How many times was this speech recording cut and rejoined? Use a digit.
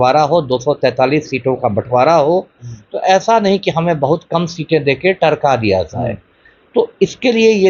0